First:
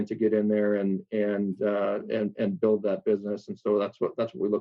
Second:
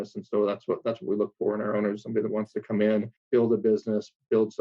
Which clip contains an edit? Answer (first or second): second